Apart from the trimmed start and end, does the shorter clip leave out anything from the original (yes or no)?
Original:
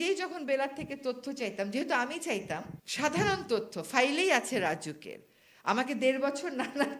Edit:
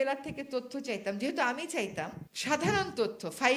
no